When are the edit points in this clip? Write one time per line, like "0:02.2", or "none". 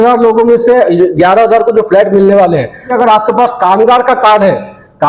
0:02.9